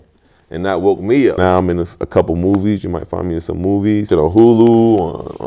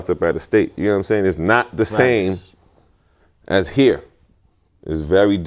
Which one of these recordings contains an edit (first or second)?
first